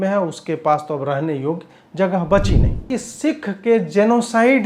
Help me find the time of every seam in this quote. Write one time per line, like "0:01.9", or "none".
0:02.8